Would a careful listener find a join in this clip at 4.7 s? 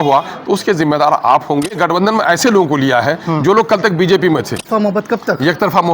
yes; 2 cuts; at 1.8 s, 4.7 s

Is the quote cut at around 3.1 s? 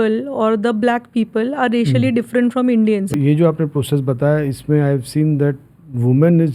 yes; 1 cut; at 3.1 s

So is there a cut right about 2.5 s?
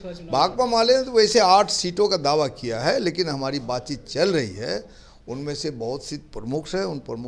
no; 0 cuts

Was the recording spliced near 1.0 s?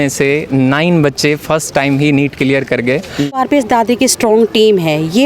no; 1 cut; at 3.4 s

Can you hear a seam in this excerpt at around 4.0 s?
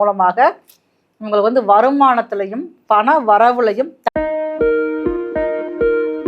yes; 1 cut; at 4.0 s

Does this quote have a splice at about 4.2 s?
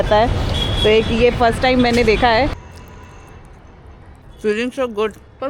yes; 2 cuts; at 2.6 s, 4.2 s

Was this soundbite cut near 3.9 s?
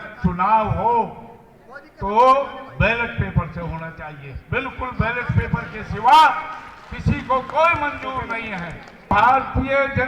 no; 1 cut; at 9.1 s

